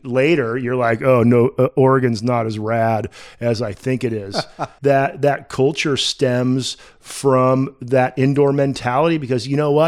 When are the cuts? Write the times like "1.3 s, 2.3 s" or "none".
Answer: 4.6 s